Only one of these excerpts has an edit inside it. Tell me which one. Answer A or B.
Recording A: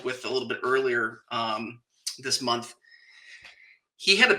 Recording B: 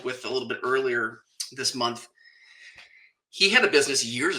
B